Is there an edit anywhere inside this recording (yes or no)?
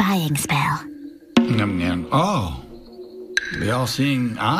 yes